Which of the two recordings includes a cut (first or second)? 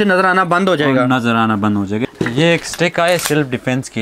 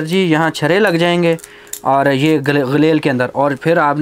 first